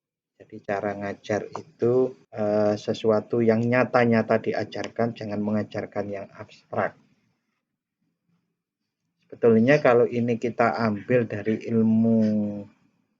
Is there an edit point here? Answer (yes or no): yes